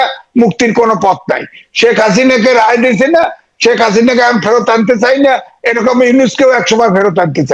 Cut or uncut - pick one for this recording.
uncut